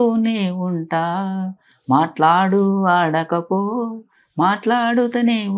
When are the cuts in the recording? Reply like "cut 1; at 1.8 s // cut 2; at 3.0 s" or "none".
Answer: none